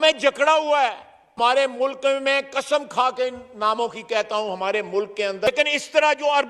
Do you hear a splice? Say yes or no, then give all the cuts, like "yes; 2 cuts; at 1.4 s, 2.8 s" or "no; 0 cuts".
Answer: yes; 2 cuts; at 1.4 s, 5.5 s